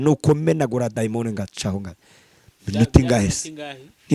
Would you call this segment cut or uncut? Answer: uncut